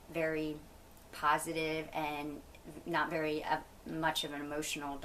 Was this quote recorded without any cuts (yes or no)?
yes